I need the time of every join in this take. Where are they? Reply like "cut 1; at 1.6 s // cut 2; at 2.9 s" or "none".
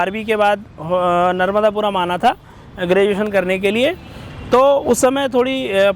none